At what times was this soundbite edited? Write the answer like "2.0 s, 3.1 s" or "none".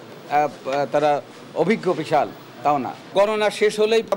none